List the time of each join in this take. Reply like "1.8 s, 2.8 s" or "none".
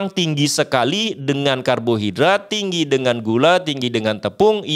none